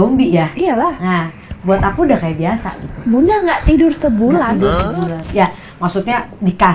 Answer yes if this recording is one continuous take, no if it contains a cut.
yes